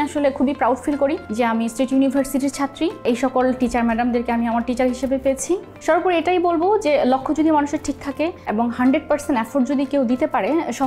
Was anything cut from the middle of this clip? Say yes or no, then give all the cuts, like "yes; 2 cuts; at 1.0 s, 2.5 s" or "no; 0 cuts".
yes; 4 cuts; at 1.2 s, 3.0 s, 5.7 s, 8.4 s